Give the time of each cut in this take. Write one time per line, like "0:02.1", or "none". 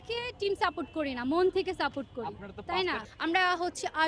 0:03.1